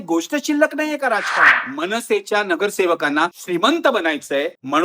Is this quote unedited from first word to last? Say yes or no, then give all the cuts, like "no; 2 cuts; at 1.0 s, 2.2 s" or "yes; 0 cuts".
no; 1 cut; at 1.6 s